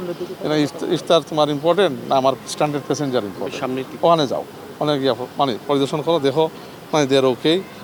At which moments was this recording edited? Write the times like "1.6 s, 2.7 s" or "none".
none